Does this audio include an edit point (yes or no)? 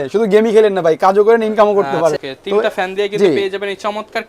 yes